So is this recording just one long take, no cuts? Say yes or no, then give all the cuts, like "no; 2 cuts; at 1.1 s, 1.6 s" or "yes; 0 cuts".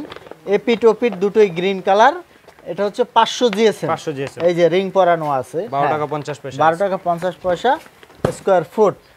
yes; 0 cuts